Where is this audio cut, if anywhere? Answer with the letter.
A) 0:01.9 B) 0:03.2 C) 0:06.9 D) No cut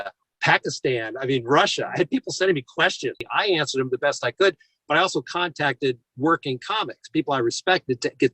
B